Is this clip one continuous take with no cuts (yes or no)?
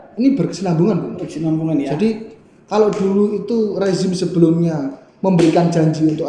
yes